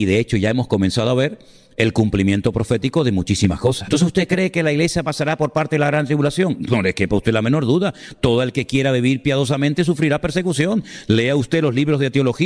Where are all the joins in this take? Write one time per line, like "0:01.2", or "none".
0:03.9

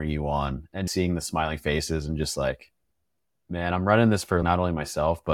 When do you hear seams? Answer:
0:00.8
0:04.4

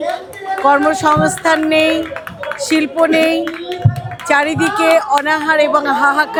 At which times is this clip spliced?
none

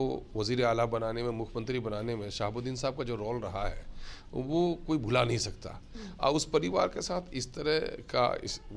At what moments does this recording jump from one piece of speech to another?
none

